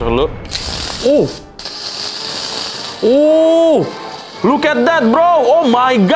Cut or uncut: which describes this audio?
uncut